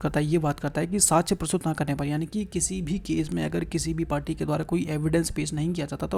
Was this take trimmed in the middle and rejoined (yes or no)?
no